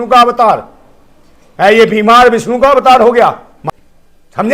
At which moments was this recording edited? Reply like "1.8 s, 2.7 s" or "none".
3.6 s